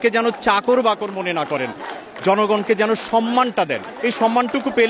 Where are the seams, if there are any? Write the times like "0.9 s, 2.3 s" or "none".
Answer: none